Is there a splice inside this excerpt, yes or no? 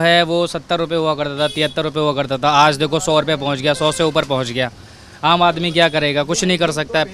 no